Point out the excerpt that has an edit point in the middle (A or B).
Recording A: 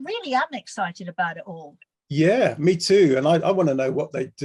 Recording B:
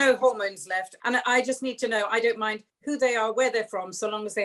B